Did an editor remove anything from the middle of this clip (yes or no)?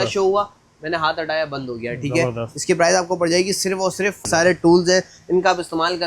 yes